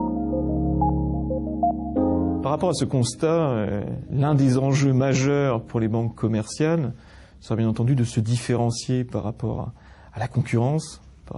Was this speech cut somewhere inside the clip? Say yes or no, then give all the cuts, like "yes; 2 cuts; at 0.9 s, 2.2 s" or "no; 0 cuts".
yes; 1 cut; at 2.1 s